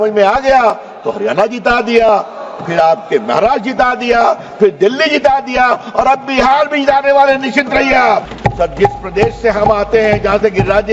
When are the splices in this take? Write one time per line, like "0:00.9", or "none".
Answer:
0:08.3